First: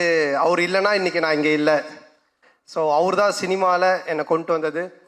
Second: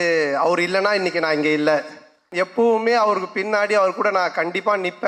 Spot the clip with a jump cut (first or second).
second